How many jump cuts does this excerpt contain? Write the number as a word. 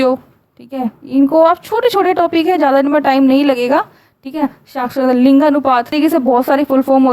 one